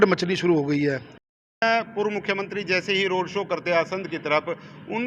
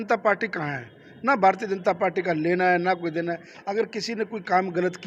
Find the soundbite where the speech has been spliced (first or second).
first